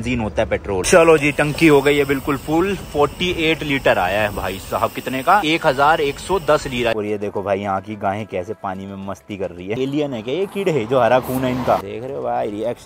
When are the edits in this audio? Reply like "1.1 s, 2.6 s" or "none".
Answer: 0.9 s, 5.4 s, 6.9 s, 9.8 s, 11.9 s